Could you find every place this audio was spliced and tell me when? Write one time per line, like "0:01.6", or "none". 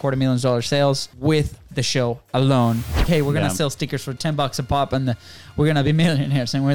0:01.1
0:03.0

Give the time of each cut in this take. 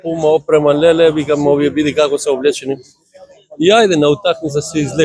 none

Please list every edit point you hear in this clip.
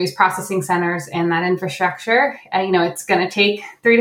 none

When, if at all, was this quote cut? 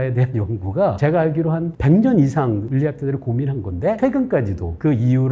0:01.0
0:02.7
0:04.0

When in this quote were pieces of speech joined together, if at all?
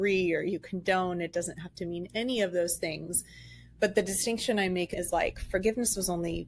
0:04.9

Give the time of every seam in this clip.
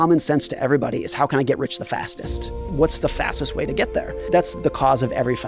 0:02.7
0:04.5

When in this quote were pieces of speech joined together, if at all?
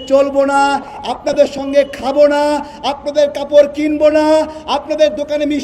none

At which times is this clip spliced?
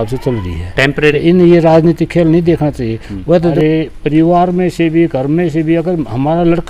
0:01.1
0:03.5

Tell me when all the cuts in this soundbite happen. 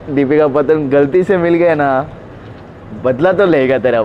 none

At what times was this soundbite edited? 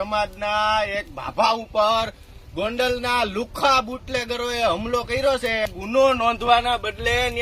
0:05.6

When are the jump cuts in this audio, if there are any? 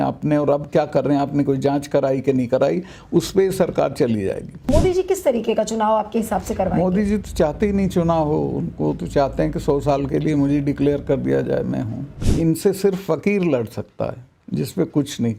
0:04.5
0:12.2

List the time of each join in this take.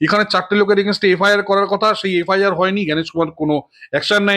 none

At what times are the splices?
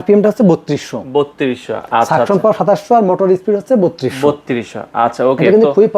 none

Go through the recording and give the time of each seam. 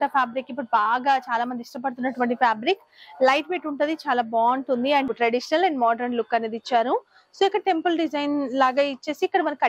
0:05.1

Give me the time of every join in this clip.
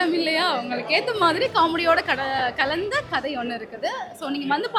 none

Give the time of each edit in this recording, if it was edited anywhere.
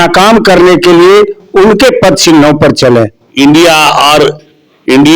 0:03.2

